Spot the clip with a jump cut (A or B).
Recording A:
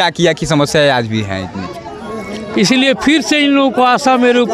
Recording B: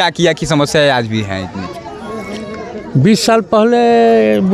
A